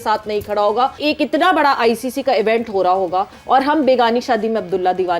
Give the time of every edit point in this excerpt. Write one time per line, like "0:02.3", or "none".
0:01.0